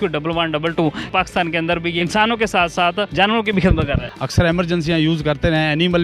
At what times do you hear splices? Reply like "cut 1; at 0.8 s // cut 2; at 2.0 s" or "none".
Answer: cut 1; at 1.0 s // cut 2; at 2.0 s // cut 3; at 3.1 s // cut 4; at 4.1 s

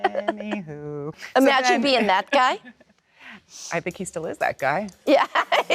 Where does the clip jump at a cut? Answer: cut 1; at 1.2 s

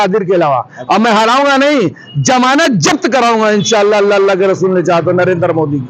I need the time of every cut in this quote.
none

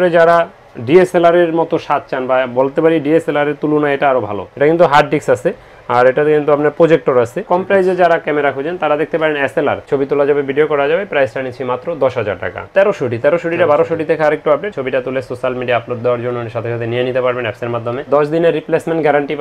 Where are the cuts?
cut 1; at 4.4 s // cut 2; at 7.4 s // cut 3; at 9.8 s // cut 4; at 12.6 s // cut 5; at 14.7 s // cut 6; at 18.0 s

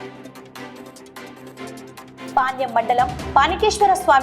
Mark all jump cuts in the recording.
cut 1; at 2.3 s

